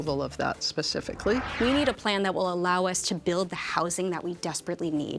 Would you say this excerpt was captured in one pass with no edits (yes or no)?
no